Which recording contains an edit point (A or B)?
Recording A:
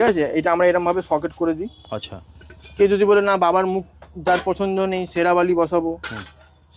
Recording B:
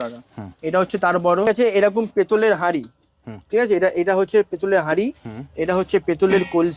B